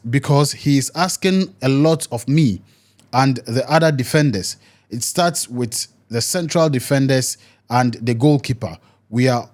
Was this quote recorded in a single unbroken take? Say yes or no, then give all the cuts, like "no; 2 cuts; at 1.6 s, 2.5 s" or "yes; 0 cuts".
yes; 0 cuts